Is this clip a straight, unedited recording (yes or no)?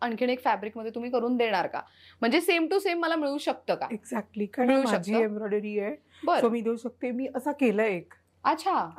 yes